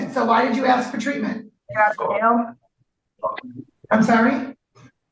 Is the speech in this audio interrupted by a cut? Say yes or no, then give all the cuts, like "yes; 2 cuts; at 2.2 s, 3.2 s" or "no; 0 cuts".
yes; 1 cut; at 1.6 s